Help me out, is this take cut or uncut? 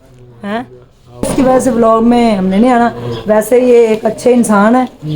cut